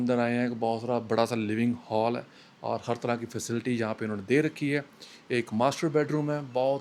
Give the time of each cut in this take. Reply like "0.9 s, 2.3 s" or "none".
none